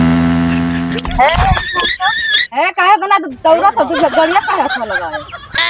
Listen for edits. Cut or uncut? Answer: uncut